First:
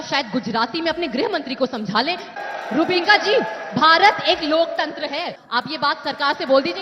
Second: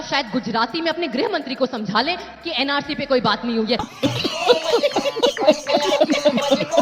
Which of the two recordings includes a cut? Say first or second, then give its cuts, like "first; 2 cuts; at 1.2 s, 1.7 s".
first; 2 cuts; at 2.3 s, 5.4 s